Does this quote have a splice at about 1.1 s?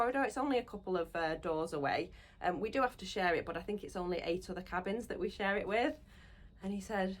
no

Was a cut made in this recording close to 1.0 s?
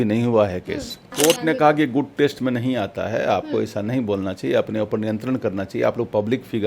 yes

